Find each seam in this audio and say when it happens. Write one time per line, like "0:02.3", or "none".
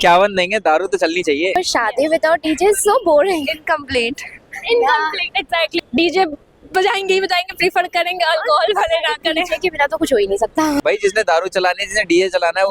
0:01.6
0:05.8
0:10.8